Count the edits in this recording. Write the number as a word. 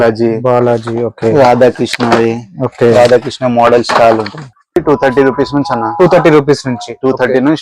one